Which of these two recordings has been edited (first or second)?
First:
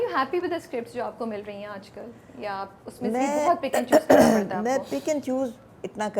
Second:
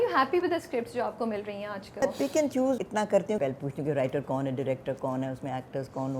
second